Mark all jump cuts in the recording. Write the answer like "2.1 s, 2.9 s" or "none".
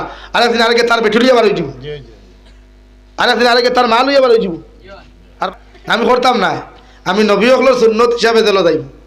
5.5 s